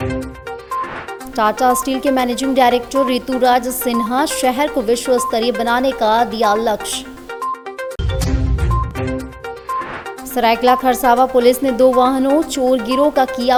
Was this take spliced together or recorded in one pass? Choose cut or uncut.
uncut